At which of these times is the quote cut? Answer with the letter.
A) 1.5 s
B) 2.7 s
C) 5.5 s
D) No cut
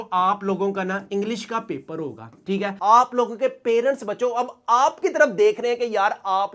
B